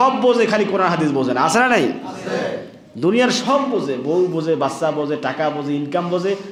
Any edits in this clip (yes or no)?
no